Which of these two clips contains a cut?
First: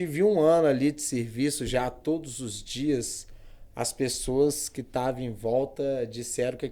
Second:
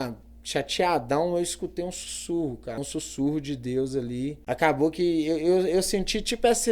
second; 2 cuts; at 2.8 s, 4.4 s

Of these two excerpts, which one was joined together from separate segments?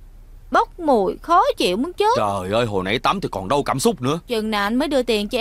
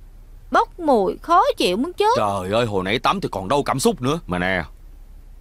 first; 1 cut; at 4.2 s

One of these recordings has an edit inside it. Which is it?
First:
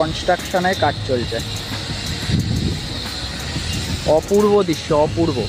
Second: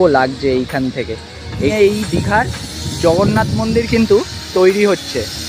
second; 1 cut; at 1.7 s

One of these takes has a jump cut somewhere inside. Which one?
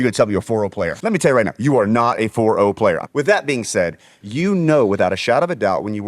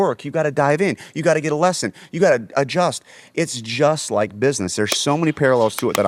first; 3 cuts; at 0.9 s, 3.1 s, 4.2 s

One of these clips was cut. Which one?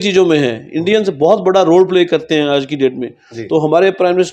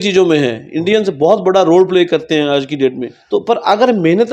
second; 1 cut; at 3.1 s

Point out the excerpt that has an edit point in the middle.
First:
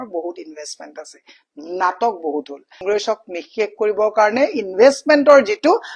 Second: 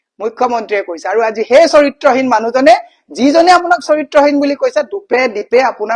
first; 1 cut; at 2.8 s

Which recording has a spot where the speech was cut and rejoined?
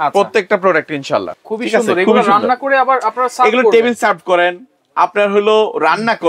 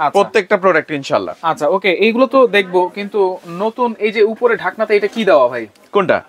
first; 1 cut; at 1.3 s

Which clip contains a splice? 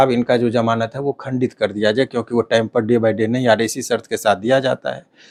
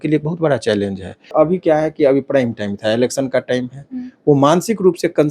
second; 1 cut; at 1.3 s

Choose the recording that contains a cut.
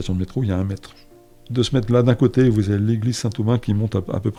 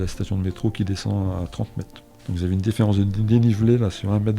second; 1 cut; at 2.1 s

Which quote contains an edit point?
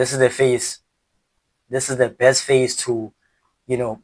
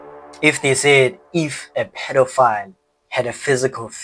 first; 1 cut; at 1.6 s

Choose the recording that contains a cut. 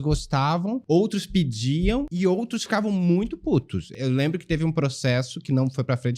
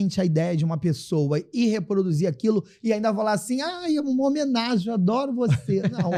first; 3 cuts; at 0.8 s, 2.1 s, 3.9 s

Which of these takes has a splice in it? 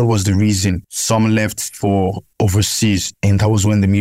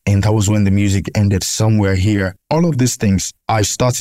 second; 1 cut; at 2.4 s

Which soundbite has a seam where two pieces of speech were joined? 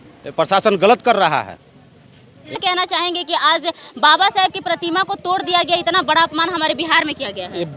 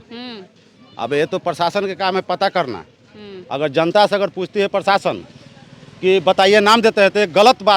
first; 1 cut; at 2.6 s

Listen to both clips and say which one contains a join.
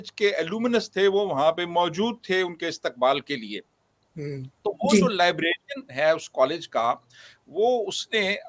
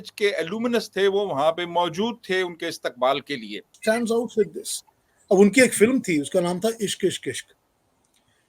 second; 1 cut; at 3.7 s

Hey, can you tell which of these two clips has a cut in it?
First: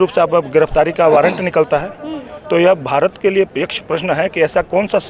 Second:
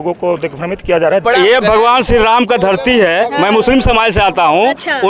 second; 1 cut; at 1.2 s

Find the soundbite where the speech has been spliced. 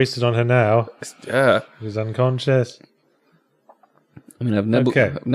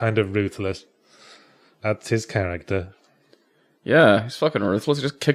first; 1 cut; at 2.7 s

